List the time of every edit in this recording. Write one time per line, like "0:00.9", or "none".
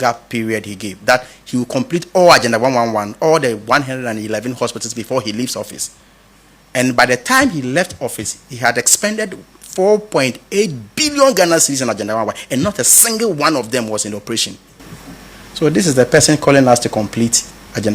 0:15.0